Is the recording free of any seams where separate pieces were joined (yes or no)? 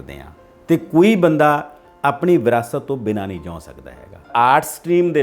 no